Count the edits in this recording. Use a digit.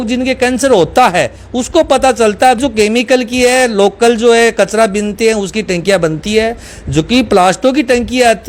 1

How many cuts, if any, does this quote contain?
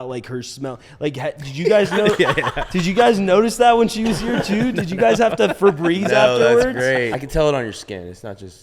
1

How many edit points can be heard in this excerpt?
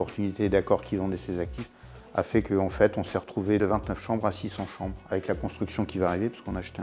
0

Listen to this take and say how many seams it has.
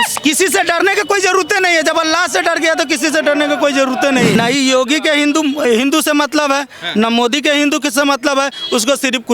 1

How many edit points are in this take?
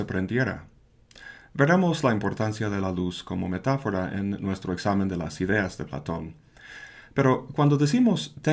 1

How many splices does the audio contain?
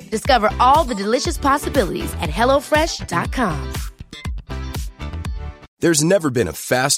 1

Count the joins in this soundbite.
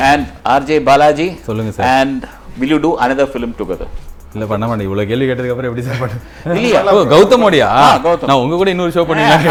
0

